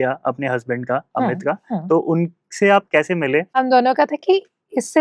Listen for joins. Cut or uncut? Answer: cut